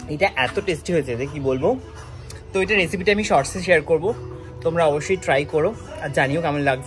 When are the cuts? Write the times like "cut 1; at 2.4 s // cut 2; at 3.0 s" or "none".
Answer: none